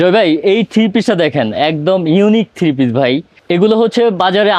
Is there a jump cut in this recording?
no; 0 cuts

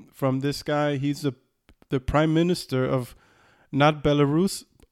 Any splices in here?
no; 0 cuts

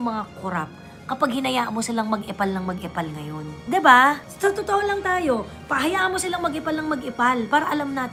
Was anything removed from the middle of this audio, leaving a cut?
no; 0 cuts

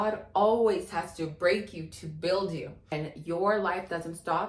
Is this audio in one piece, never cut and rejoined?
yes; 0 cuts

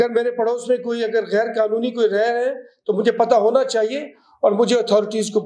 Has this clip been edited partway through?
no; 0 cuts

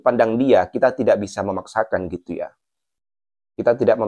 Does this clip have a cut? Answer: no; 0 cuts

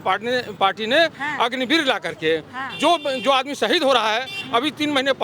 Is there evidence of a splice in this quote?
no; 0 cuts

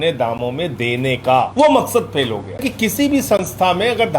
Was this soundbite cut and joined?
yes; 2 cuts; at 1.5 s, 2.6 s

